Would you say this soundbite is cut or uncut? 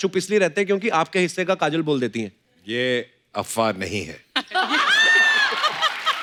uncut